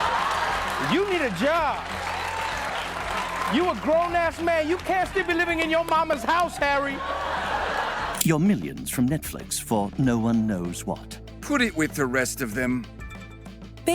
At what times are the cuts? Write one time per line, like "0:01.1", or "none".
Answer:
0:08.2